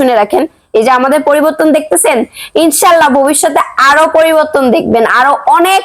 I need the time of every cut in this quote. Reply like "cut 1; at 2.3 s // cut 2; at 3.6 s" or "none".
none